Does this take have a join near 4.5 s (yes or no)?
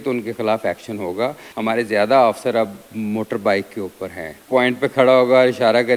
yes